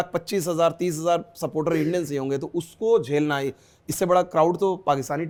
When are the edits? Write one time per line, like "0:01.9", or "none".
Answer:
none